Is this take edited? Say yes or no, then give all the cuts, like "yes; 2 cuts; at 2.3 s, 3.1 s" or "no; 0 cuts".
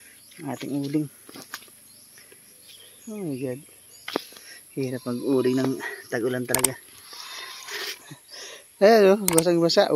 yes; 1 cut; at 8.0 s